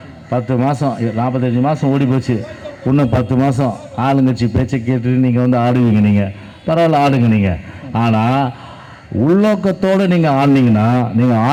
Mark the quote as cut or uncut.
uncut